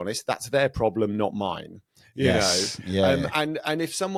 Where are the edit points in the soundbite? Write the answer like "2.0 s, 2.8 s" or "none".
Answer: none